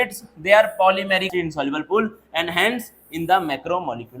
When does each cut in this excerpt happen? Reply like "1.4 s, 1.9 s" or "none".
1.3 s

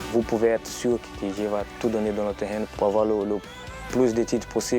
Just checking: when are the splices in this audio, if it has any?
2.7 s

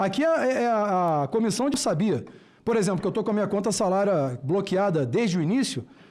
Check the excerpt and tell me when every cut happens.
1.7 s

